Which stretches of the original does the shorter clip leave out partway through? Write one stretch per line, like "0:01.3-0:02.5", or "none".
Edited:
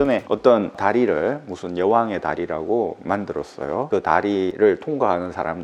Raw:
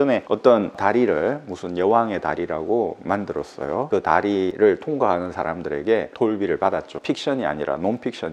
none

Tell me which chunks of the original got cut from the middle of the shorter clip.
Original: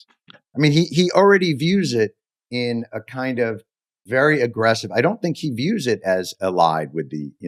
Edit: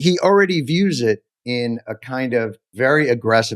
0:02.3-0:02.4
0:03.7-0:03.9

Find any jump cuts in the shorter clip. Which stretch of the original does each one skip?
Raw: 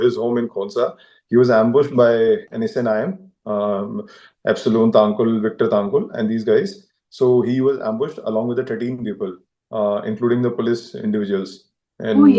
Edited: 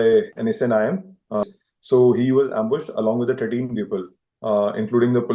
0:03.6-0:06.7

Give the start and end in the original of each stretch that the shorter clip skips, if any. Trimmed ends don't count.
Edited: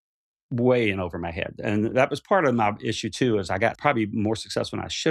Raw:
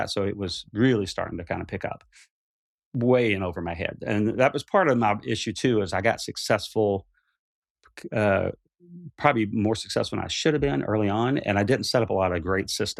0:06.2-0:09.2

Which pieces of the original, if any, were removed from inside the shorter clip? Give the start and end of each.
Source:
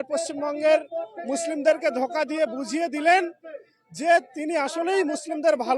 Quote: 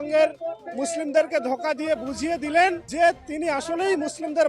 0:03.4-0:03.9

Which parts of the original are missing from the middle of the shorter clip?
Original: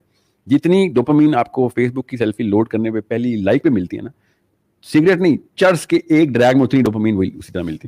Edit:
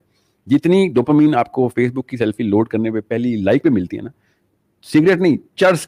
none

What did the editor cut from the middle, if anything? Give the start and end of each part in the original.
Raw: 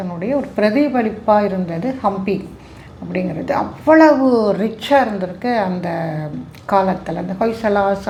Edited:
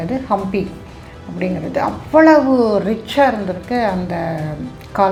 none

